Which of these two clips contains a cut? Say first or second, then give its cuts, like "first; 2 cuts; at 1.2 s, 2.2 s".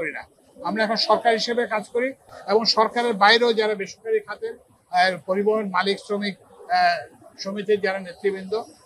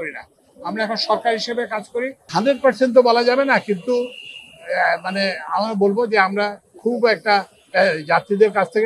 second; 1 cut; at 2.2 s